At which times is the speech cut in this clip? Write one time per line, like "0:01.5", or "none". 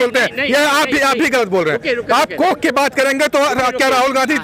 none